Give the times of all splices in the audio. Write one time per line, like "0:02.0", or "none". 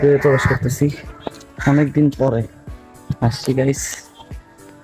none